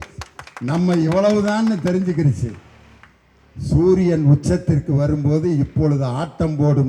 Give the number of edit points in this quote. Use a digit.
0